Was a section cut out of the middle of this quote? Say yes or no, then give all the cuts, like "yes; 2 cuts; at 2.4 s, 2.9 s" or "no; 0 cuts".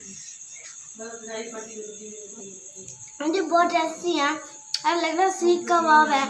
yes; 1 cut; at 3.2 s